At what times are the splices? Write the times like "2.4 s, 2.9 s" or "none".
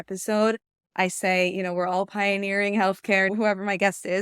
3.3 s